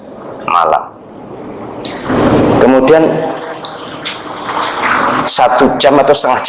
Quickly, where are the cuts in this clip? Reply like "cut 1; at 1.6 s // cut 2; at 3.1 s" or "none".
cut 1; at 2.0 s